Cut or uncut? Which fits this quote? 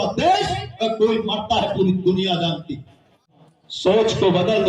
cut